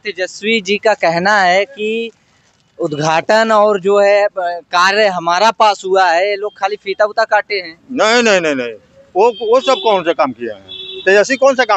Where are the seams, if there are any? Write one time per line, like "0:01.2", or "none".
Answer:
none